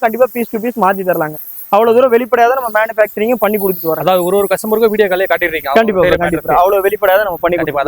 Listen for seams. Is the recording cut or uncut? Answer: uncut